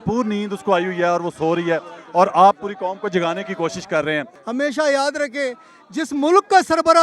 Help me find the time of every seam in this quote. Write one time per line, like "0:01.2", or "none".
0:04.4